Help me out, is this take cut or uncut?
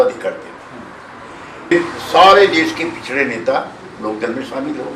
cut